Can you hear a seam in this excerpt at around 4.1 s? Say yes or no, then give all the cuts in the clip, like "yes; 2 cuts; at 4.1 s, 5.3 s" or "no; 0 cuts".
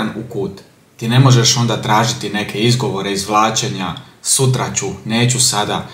no; 0 cuts